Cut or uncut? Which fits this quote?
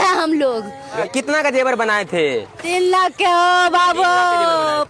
cut